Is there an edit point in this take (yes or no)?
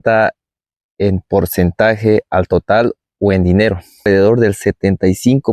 yes